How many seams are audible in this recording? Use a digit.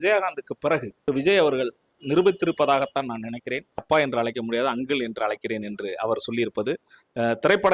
2